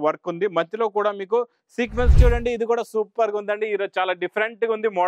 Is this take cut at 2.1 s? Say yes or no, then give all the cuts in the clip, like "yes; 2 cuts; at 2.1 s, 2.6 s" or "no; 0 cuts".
yes; 1 cut; at 2.1 s